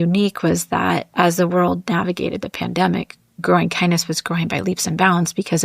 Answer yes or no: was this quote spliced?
yes